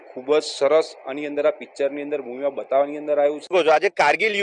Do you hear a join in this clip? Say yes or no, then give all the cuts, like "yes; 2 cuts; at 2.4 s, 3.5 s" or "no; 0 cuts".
yes; 1 cut; at 3.5 s